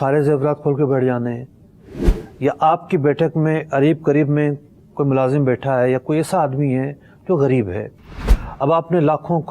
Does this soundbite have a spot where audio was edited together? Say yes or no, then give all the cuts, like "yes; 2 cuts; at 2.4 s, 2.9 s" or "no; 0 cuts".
no; 0 cuts